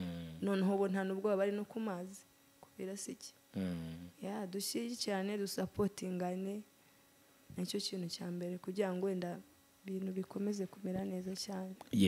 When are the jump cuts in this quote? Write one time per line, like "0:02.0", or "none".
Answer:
none